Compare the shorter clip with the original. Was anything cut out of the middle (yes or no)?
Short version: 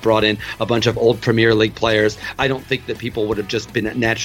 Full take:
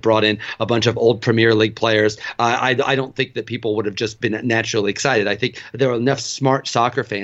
yes